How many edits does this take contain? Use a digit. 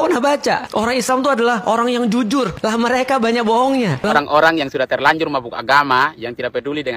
1